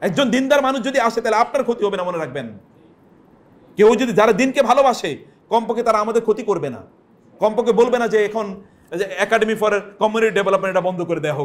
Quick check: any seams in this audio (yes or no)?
no